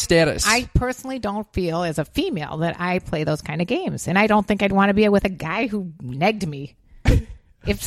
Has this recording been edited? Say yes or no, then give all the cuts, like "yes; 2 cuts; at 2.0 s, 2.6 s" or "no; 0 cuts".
no; 0 cuts